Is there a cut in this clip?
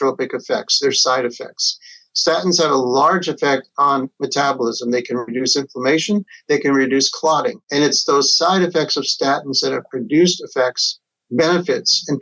yes; 1 cut; at 7.6 s

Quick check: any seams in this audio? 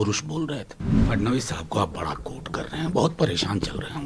yes; 1 cut; at 1.0 s

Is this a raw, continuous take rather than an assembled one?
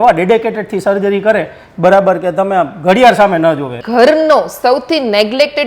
no; 1 cut; at 3.8 s

